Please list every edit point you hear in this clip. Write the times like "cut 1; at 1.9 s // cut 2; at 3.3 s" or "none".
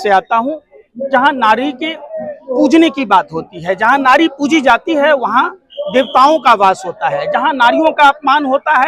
none